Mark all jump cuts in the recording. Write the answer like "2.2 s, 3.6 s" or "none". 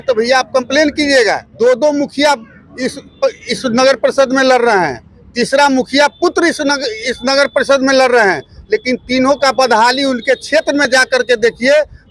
1.5 s